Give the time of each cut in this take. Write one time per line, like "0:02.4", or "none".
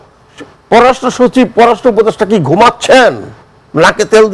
none

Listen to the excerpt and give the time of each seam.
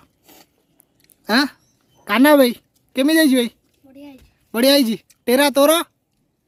none

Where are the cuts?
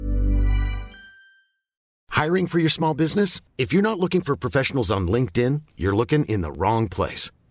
none

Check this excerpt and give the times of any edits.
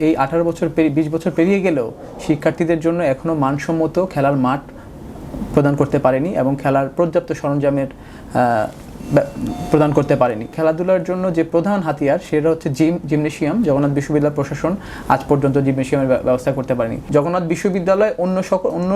0:10.5
0:17.0

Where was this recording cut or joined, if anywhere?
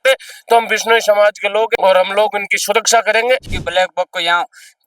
0:01.7
0:03.5

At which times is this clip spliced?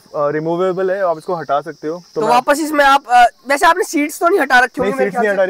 none

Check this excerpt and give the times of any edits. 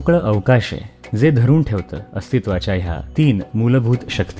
0:03.0

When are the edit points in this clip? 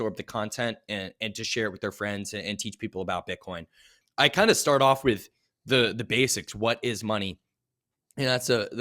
0:03.9

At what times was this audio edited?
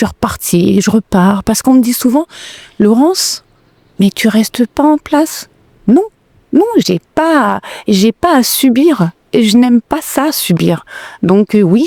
none

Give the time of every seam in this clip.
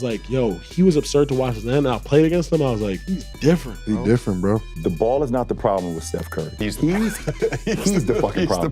0:03.1
0:04.7
0:06.5

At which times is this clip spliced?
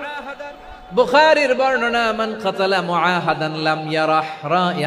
none

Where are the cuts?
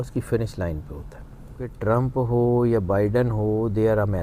0:01.7

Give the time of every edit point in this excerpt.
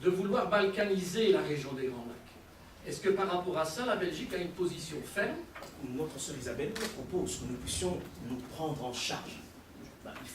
0:05.7

